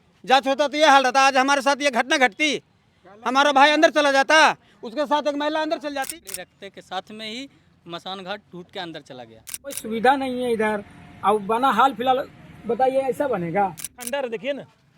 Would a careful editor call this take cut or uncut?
cut